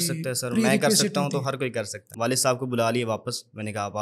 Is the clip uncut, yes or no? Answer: no